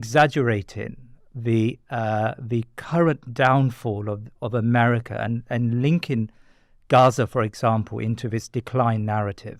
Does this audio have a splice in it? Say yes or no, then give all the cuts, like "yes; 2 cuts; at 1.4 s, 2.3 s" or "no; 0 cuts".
no; 0 cuts